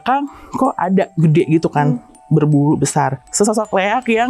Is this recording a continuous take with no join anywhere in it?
no; 1 cut; at 3.2 s

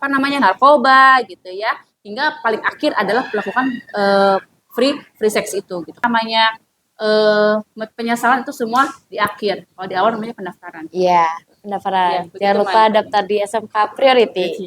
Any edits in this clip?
yes; 1 cut; at 6.0 s

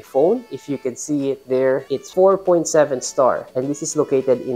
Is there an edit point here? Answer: yes; 1 cut; at 2.0 s

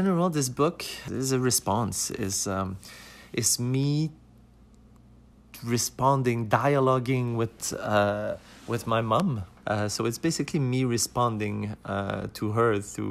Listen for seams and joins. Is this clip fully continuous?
no; 2 cuts; at 0.9 s, 9.5 s

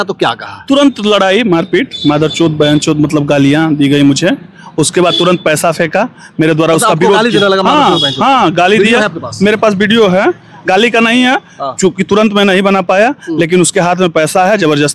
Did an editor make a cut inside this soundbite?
no; 0 cuts

